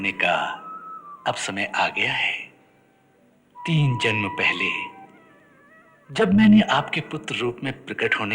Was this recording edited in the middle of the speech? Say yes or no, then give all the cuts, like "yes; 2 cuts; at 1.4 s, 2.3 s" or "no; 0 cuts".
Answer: yes; 1 cut; at 3.6 s